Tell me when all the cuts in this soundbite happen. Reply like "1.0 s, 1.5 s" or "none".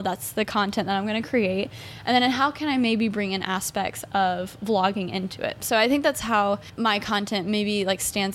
6.7 s